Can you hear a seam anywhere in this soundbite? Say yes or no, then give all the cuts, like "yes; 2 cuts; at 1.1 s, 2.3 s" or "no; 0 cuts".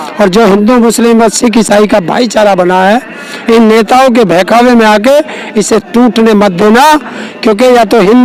no; 0 cuts